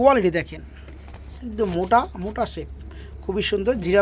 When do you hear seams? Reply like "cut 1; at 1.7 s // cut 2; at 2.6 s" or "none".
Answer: none